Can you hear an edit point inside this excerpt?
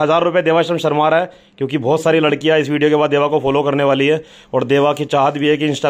no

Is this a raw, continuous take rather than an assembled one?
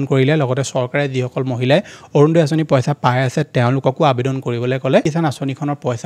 no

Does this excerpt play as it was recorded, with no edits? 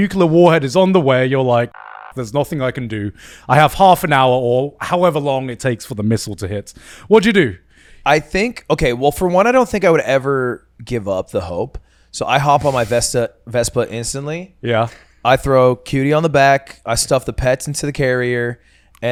yes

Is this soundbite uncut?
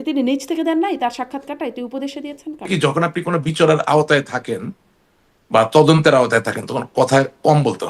no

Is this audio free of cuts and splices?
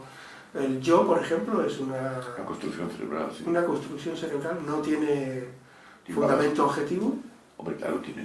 yes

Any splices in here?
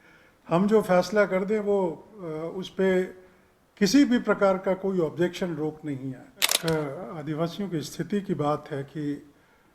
yes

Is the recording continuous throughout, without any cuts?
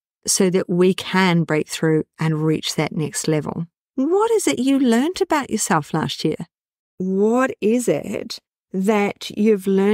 no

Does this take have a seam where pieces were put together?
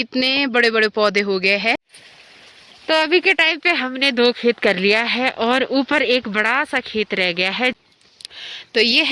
yes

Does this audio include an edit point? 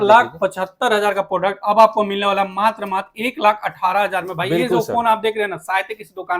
no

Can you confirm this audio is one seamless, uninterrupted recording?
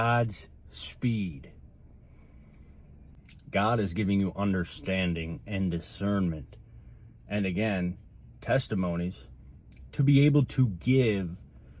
no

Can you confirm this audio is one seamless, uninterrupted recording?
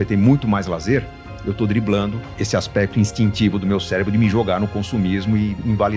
yes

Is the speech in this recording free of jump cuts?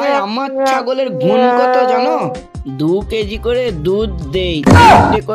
yes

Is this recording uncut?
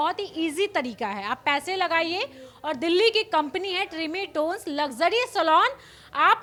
yes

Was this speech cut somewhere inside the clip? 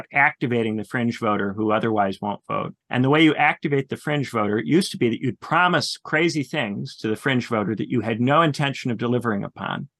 yes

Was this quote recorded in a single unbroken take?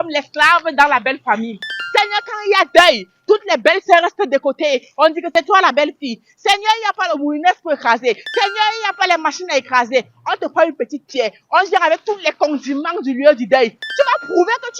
yes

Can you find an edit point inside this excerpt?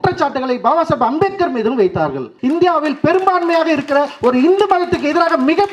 yes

